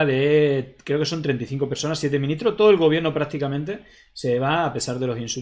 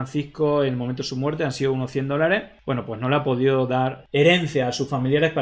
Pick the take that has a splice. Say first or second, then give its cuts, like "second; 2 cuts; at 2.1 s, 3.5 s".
second; 2 cuts; at 2.5 s, 4.0 s